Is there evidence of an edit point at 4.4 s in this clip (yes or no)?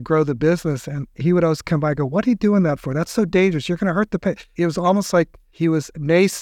no